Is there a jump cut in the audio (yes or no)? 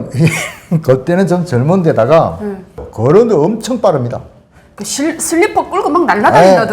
yes